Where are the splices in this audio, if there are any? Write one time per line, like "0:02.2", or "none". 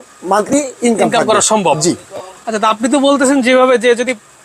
none